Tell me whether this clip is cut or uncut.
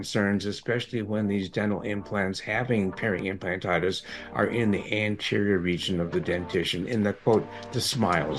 uncut